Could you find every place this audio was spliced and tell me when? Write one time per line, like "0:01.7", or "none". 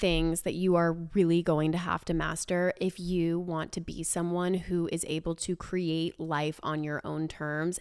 none